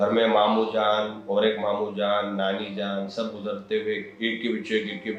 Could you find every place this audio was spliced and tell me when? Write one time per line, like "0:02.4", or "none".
none